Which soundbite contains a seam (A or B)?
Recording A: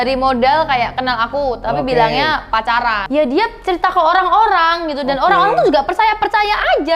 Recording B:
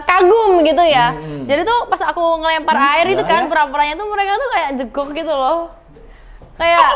A